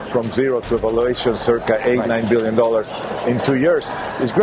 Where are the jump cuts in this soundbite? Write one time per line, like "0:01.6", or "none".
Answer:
none